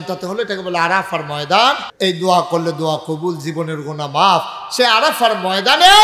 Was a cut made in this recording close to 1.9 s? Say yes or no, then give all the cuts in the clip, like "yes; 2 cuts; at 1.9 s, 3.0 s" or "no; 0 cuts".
yes; 1 cut; at 1.9 s